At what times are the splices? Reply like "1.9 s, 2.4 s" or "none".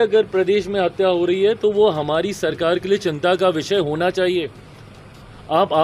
none